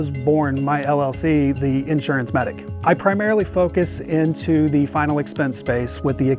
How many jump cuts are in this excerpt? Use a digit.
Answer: 0